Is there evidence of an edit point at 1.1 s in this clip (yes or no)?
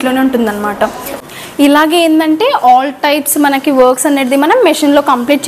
yes